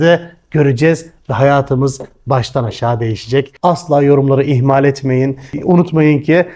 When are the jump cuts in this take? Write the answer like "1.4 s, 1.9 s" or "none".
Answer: 3.5 s, 5.6 s